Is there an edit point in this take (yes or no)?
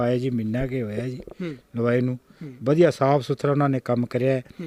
no